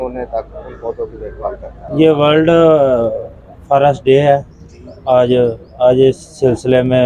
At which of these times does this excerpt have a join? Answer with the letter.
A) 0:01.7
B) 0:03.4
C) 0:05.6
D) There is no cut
A